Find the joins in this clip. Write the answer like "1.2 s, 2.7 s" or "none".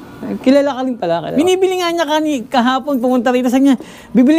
1.3 s